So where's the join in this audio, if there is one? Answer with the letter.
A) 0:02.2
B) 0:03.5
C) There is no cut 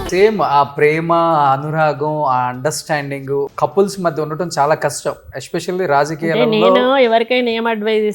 B